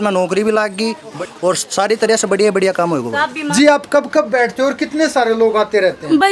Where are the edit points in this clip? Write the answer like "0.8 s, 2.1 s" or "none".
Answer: 1.2 s, 3.4 s